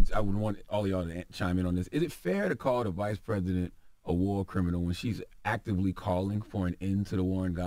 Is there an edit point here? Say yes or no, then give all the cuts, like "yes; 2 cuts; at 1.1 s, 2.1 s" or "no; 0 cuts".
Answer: no; 0 cuts